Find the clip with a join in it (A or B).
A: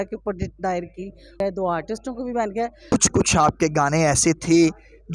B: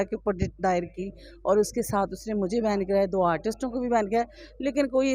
A